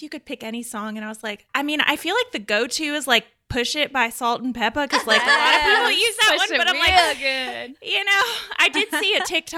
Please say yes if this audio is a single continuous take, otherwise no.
no